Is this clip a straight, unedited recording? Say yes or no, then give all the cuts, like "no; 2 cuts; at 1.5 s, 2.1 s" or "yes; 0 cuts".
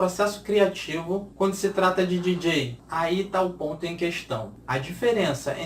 no; 3 cuts; at 1.3 s, 2.8 s, 4.5 s